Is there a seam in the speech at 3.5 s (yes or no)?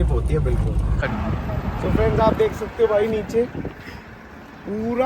no